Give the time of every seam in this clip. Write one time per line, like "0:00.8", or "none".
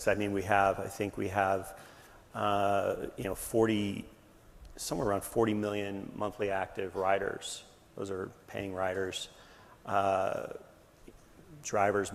none